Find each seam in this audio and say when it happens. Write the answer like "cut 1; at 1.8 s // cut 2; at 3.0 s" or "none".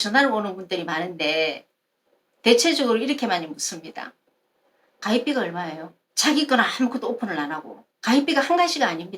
none